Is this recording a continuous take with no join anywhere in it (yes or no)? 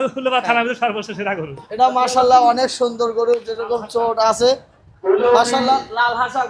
no